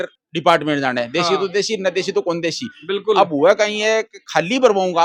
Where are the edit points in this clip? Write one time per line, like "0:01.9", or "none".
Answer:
none

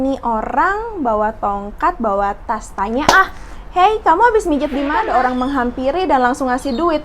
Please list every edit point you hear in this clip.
0:05.0

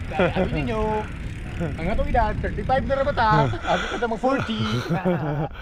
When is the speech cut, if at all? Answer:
none

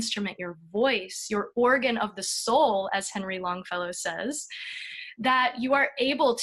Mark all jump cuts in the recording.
none

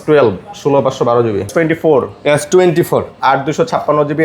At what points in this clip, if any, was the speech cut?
0:01.5

